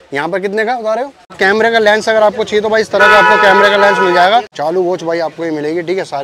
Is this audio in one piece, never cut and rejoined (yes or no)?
no